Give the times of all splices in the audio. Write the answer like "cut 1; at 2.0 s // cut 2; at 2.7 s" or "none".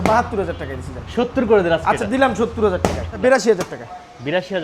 cut 1; at 3.2 s

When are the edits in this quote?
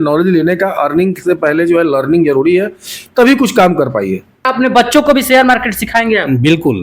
cut 1; at 4.5 s

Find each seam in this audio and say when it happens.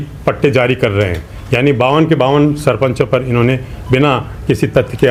none

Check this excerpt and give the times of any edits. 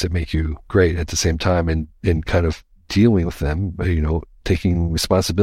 none

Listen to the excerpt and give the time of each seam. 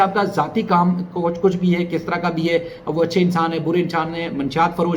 none

